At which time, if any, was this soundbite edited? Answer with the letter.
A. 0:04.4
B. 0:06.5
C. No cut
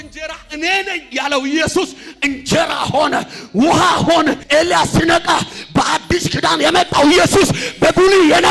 A